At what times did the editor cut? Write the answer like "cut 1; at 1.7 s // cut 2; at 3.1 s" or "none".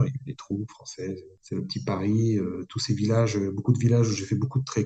cut 1; at 1.3 s